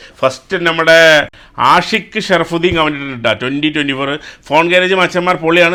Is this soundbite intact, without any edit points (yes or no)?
yes